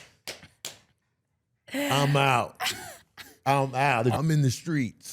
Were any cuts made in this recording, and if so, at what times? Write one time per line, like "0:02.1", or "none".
0:04.1